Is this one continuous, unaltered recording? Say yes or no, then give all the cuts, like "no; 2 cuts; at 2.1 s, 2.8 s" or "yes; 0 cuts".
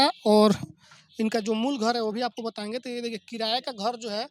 yes; 0 cuts